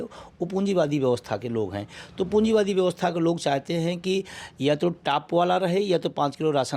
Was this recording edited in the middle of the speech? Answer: no; 0 cuts

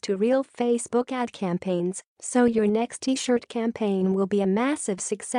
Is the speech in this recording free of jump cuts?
yes; 0 cuts

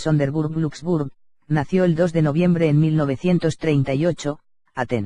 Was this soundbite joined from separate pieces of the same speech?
no; 0 cuts

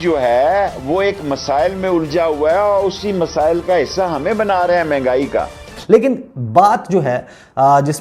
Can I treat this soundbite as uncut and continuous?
no; 1 cut; at 5.7 s

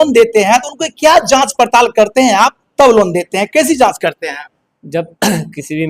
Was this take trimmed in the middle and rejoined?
no; 0 cuts

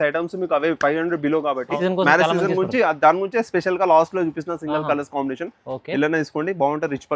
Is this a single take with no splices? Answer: no; 1 cut; at 1.8 s

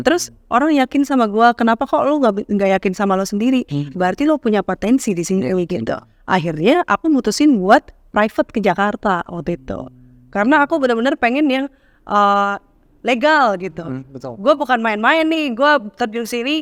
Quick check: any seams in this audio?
no; 0 cuts

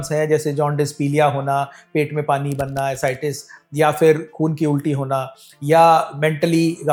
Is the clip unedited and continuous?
yes; 0 cuts

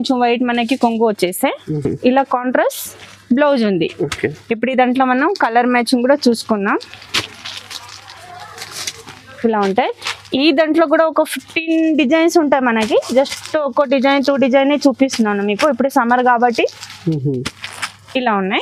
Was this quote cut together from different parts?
no; 0 cuts

